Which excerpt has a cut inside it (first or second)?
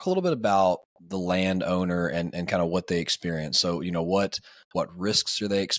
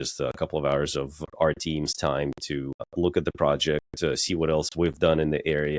second